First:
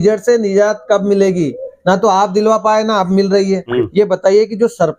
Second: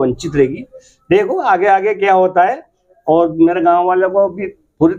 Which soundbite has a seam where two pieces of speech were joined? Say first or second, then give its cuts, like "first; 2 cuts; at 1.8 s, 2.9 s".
first; 1 cut; at 3.7 s